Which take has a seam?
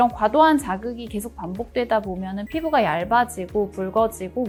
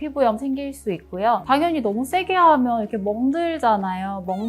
second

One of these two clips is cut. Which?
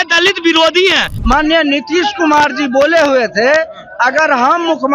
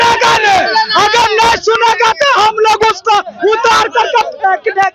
first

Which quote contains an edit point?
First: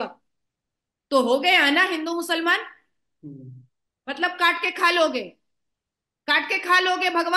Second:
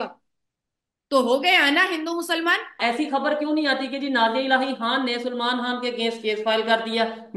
second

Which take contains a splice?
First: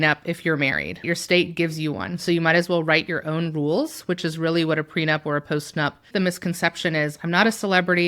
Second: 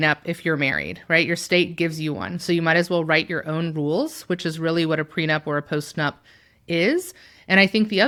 first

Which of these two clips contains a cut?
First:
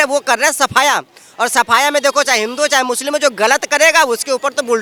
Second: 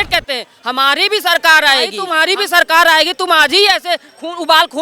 second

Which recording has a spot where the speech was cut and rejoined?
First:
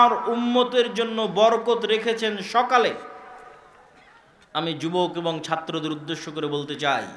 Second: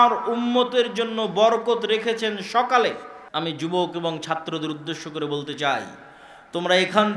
second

